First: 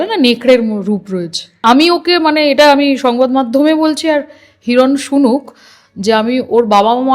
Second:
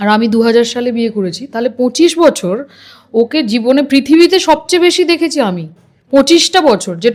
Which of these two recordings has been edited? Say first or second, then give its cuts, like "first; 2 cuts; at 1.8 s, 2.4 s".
first; 1 cut; at 1.6 s